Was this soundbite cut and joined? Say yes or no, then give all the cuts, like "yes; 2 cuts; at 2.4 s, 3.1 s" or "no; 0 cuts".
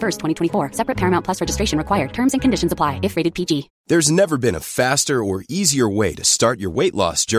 yes; 1 cut; at 3.7 s